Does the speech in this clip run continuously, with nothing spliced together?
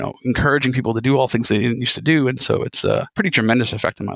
no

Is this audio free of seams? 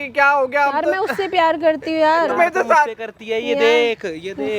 yes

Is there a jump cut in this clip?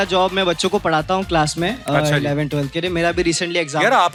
no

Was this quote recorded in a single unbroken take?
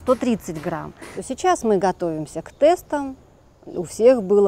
no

